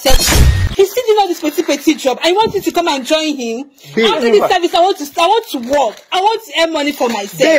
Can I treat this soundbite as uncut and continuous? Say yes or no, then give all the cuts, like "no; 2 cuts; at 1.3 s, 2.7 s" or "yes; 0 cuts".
yes; 0 cuts